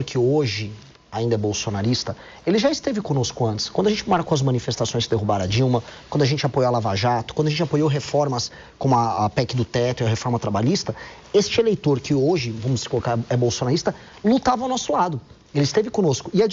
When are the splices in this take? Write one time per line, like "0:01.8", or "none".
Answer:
none

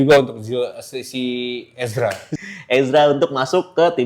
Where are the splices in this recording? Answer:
0:02.3

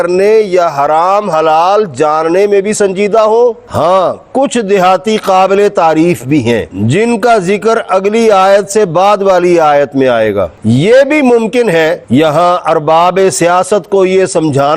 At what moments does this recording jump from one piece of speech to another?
none

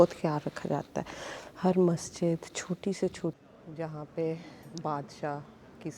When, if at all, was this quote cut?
0:03.3

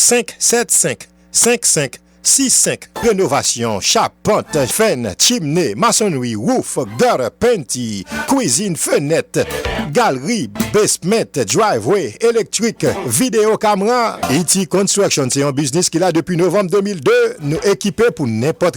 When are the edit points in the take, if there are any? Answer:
0:01.3
0:02.8

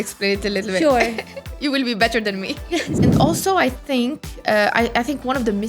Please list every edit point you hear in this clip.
0:02.9

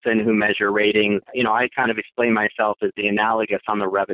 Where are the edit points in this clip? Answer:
0:01.2

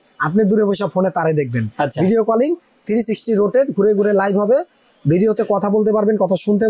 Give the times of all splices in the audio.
none

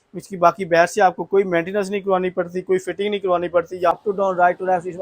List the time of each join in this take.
0:03.9

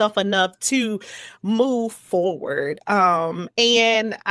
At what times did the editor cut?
none

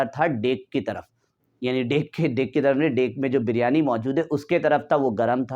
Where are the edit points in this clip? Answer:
none

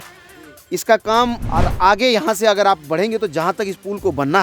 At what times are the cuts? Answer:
0:01.4

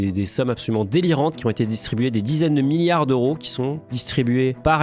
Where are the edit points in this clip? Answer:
none

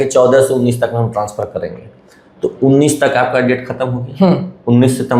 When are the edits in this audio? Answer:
none

